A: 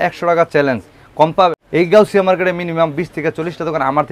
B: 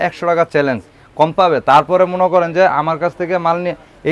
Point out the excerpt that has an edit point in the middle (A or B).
A